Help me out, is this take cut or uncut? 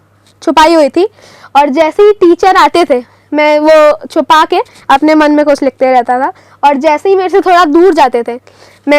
uncut